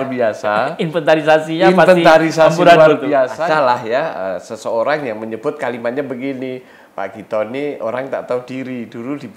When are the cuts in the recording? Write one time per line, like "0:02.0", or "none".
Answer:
0:03.3